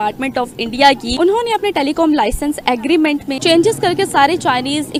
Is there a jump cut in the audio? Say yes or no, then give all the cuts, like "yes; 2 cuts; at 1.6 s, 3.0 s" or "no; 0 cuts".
no; 0 cuts